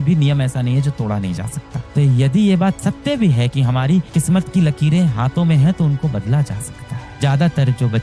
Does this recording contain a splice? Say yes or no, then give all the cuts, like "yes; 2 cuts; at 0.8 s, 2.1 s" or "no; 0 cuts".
no; 0 cuts